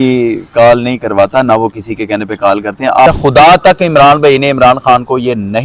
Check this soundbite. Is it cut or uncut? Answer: cut